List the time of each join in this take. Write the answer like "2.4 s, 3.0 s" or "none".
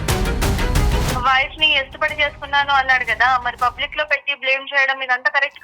1.2 s